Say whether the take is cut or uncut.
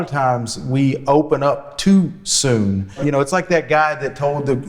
cut